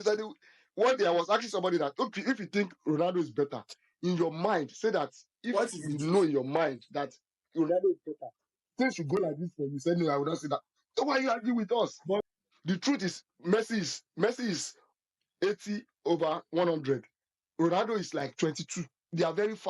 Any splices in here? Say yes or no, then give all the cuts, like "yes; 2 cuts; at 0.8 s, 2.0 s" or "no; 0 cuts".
yes; 1 cut; at 12.2 s